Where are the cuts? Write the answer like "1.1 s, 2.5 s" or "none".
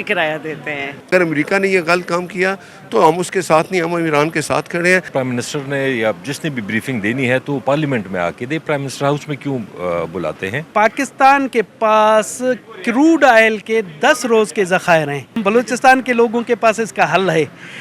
1.1 s, 5.1 s, 10.7 s, 15.4 s

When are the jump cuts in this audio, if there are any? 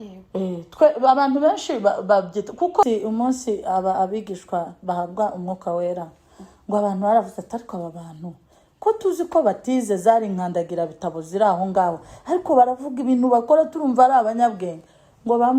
2.8 s

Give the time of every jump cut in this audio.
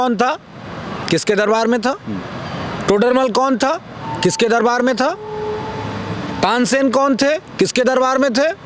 none

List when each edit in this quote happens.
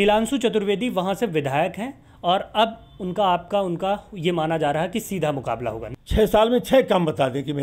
5.8 s

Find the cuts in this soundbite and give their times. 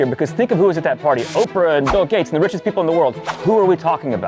none

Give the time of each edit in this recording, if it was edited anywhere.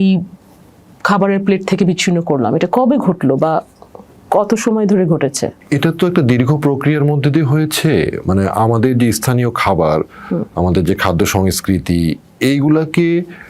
none

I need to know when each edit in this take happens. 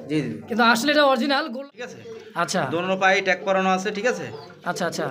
1.6 s

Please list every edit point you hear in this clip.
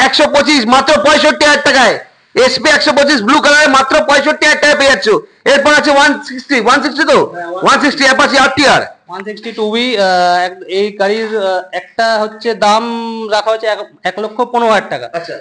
none

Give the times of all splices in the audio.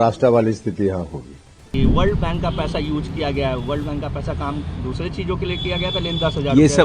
1.7 s

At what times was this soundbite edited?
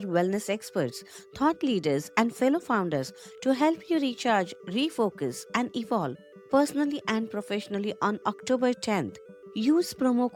none

